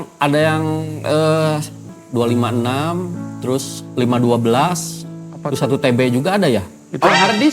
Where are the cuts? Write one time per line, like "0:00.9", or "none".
0:01.9